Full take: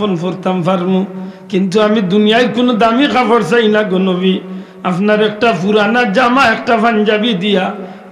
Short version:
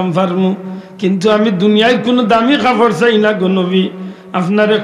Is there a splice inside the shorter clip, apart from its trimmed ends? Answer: no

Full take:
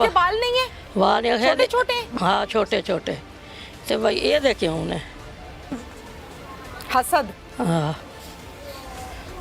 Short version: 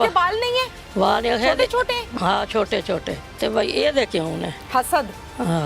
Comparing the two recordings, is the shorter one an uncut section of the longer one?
no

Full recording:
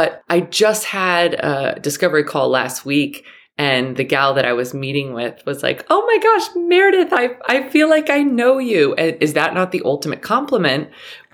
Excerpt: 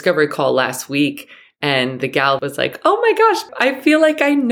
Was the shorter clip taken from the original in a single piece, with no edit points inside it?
no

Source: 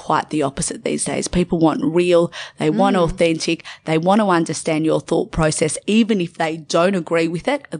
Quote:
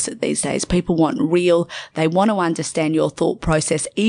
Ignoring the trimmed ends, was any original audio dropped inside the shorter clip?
yes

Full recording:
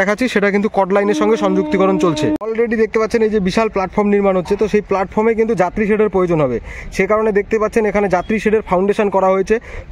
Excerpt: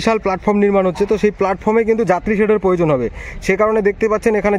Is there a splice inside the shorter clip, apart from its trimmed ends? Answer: no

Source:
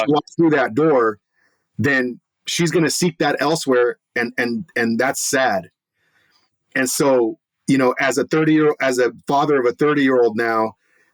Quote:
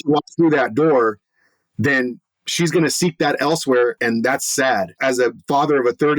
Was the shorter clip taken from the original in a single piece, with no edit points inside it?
no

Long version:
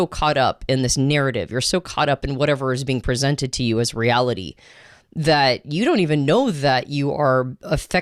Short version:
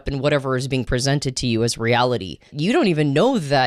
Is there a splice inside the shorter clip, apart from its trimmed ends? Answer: yes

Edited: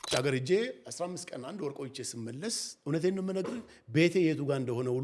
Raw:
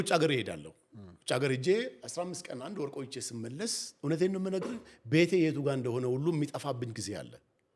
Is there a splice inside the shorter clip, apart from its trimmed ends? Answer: no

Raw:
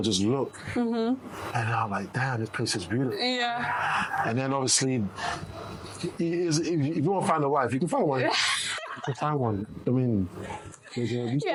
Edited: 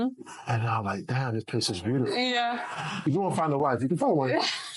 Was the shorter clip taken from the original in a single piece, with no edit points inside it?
no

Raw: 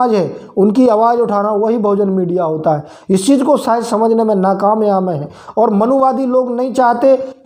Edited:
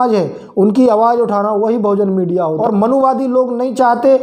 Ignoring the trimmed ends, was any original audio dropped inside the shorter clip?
yes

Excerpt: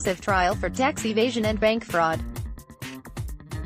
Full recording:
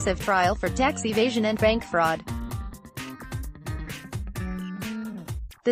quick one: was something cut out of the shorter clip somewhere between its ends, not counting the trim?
yes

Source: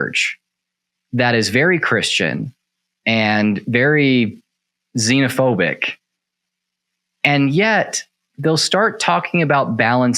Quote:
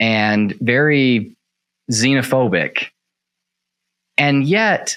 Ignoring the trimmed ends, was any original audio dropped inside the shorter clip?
no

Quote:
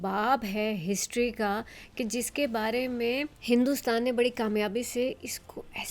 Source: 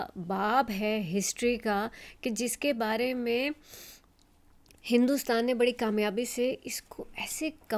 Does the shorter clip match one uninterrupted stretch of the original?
no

